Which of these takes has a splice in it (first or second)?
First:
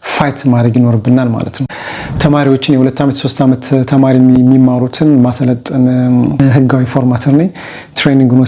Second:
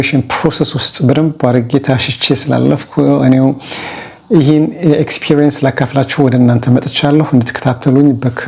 first